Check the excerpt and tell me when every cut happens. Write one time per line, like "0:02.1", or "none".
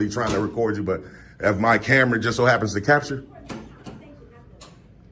none